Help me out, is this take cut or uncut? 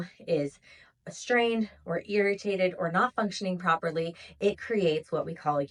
uncut